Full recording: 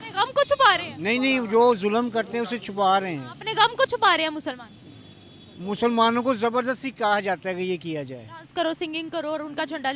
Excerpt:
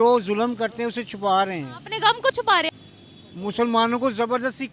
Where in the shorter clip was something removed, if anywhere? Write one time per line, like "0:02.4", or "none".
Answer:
0:02.7